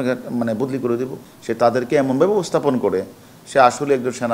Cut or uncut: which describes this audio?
cut